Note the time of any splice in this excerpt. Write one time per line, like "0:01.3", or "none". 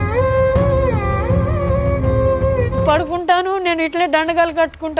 0:02.8